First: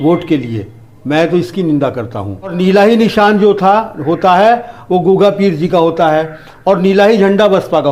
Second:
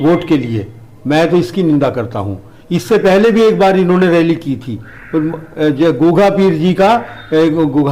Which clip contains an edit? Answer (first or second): first